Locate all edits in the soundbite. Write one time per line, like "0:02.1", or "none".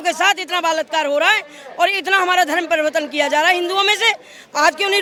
none